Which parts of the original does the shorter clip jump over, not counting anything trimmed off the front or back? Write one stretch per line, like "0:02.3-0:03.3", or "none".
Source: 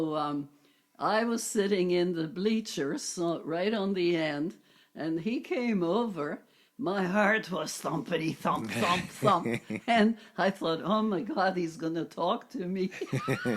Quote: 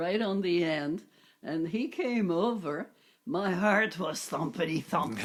none

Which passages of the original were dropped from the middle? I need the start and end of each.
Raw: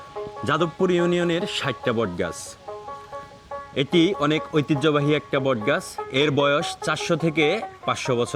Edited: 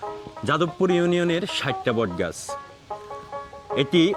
none

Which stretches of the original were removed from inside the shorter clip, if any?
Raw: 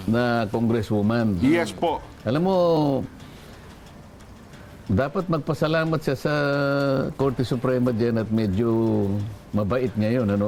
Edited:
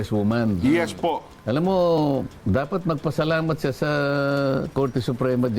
0:03.1-0:04.8

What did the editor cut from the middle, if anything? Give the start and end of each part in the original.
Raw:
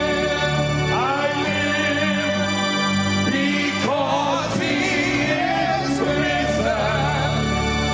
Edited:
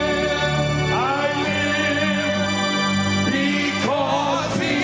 none

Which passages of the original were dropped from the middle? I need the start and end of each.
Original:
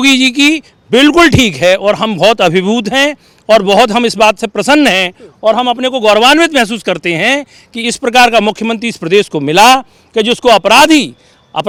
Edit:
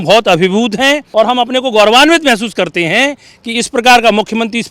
0:03.2-0:05.3

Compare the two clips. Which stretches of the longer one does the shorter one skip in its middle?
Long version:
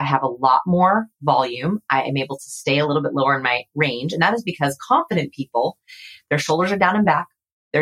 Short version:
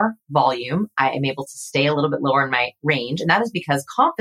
none

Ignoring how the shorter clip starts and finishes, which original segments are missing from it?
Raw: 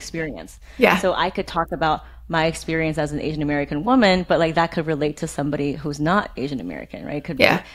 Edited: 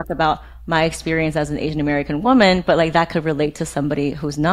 none

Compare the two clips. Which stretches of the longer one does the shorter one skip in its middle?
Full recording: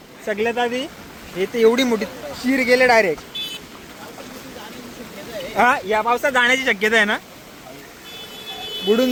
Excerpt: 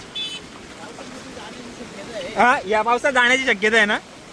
none

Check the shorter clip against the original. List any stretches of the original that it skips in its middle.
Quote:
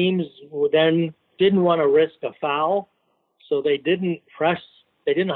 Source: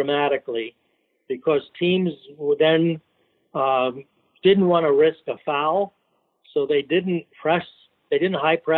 0:03.1-0:04.3

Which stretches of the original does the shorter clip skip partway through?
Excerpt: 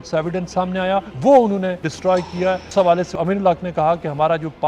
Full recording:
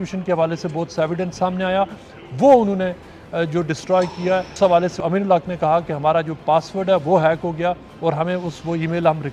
0:02.0-0:02.3
0:03.1-0:03.7

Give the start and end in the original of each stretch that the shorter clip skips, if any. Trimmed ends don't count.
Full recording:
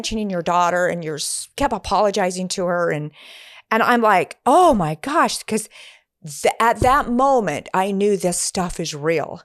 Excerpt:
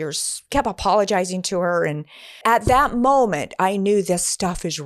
0:03.5-0:06.6

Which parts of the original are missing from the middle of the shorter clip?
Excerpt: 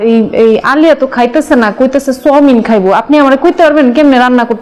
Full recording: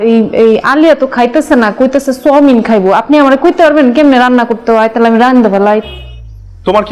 none

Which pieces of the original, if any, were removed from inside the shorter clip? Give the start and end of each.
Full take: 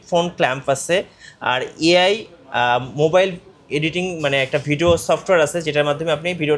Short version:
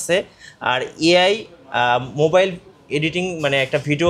none

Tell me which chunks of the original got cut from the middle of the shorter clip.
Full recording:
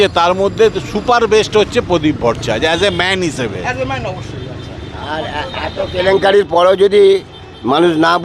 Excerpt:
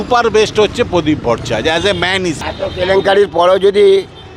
0:03.4-0:05.6

